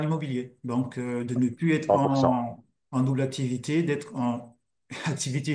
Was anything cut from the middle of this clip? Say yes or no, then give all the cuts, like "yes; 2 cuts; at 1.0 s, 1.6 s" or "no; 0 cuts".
no; 0 cuts